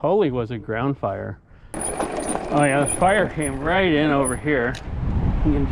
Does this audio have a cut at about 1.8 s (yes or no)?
yes